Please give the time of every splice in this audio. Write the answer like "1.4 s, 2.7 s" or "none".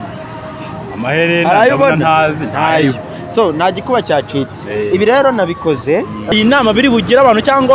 6.3 s